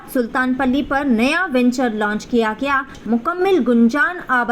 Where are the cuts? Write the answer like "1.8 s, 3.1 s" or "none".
3.0 s